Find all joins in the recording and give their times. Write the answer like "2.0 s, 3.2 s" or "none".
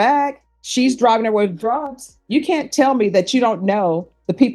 none